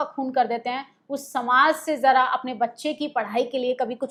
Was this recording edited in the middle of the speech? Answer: no; 0 cuts

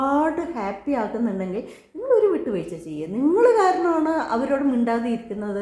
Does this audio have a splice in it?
no; 0 cuts

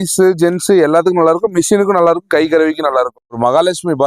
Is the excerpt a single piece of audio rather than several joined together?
no; 1 cut; at 3.2 s

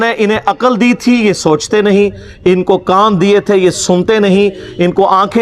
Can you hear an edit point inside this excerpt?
no; 0 cuts

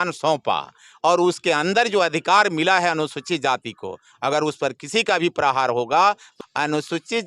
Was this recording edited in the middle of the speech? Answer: yes; 1 cut; at 6.3 s

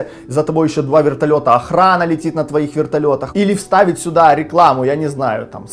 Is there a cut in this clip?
yes; 1 cut; at 3.3 s

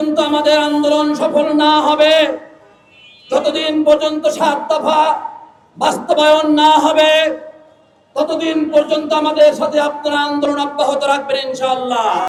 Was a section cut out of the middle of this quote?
no; 0 cuts

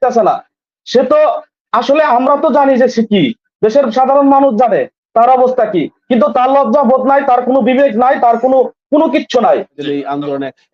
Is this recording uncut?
no; 1 cut; at 9.8 s

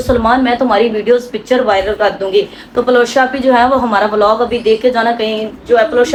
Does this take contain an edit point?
no; 0 cuts

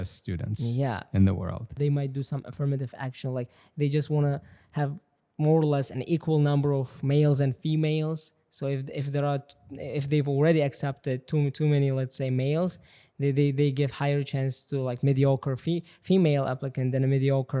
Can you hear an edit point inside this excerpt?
yes; 1 cut; at 1.8 s

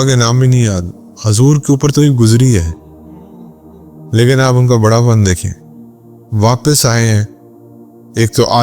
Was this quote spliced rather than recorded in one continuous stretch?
yes; 2 cuts; at 2.7 s, 4.1 s

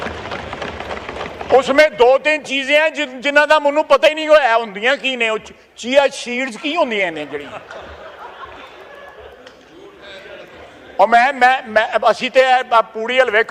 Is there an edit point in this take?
no; 0 cuts

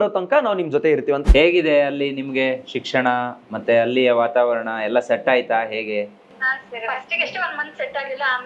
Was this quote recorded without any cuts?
no; 1 cut; at 1.3 s

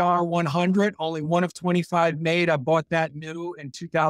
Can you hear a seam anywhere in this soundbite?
no; 0 cuts

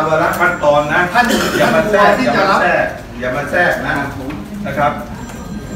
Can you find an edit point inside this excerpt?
no; 0 cuts

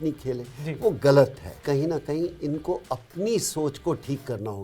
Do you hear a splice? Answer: yes; 1 cut; at 1.5 s

